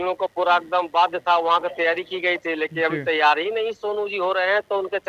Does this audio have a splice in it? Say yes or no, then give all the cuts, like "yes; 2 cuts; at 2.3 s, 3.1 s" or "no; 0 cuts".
no; 0 cuts